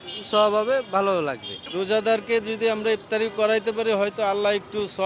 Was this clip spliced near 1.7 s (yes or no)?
yes